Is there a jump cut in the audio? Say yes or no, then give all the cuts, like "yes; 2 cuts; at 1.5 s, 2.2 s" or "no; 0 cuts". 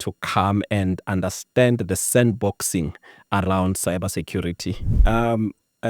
yes; 1 cut; at 4.9 s